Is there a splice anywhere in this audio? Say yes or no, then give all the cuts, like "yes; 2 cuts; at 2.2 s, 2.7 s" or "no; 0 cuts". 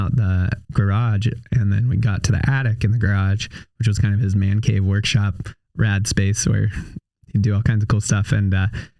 no; 0 cuts